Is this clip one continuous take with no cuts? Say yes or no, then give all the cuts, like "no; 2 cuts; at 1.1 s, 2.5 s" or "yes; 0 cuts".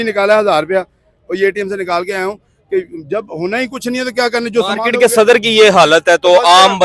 yes; 0 cuts